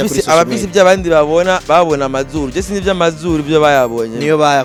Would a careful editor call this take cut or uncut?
uncut